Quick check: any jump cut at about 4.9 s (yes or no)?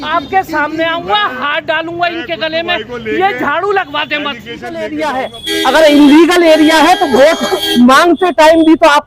yes